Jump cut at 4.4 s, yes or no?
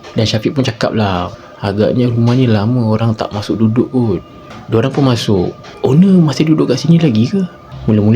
no